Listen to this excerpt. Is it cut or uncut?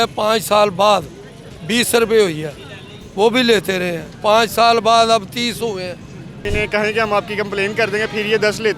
cut